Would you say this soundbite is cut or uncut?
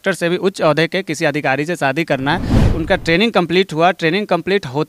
cut